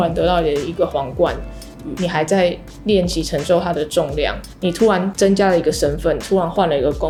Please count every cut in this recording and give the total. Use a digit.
0